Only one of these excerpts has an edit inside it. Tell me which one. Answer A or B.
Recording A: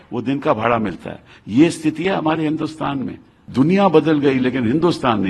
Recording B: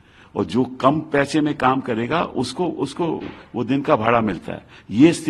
A